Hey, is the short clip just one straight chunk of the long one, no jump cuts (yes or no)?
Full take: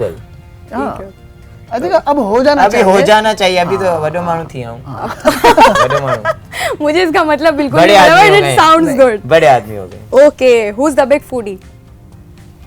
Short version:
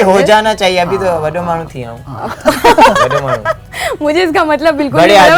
yes